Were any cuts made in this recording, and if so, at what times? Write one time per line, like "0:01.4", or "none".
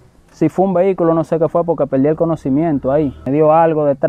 0:03.2